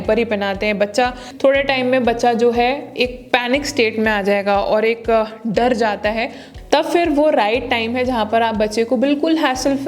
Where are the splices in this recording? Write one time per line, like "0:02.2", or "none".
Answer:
0:01.2
0:06.4